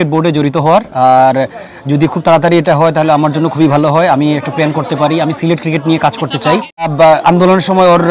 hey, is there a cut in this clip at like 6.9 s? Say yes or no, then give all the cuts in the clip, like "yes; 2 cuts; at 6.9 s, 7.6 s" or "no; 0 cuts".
yes; 1 cut; at 6.9 s